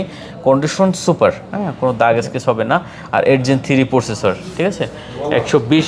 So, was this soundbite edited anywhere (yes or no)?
no